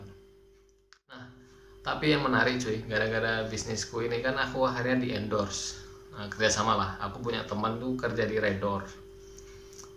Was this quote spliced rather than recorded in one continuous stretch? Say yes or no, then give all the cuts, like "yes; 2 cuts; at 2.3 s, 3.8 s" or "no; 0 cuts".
yes; 1 cut; at 1.2 s